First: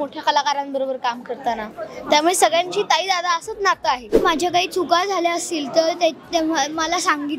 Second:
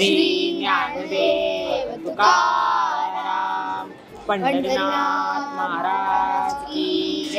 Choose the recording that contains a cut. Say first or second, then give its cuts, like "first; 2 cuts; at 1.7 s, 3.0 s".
first; 1 cut; at 4.2 s